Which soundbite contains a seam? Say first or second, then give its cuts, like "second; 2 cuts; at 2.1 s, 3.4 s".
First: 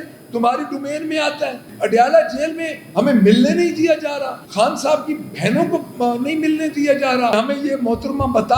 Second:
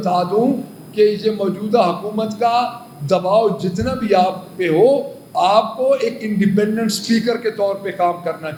first; 3 cuts; at 1.7 s, 4.4 s, 7.3 s